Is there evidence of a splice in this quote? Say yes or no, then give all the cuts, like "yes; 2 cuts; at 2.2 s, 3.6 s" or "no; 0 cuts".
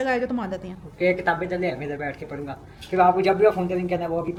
no; 0 cuts